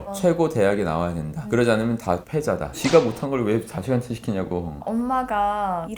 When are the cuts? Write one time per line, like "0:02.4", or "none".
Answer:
0:02.7
0:04.8